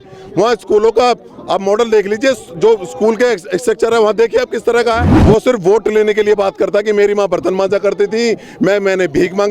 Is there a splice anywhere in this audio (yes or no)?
yes